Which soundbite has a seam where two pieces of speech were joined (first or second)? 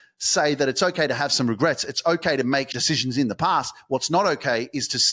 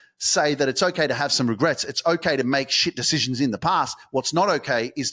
first